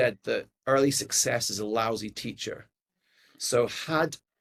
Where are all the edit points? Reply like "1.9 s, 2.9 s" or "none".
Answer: none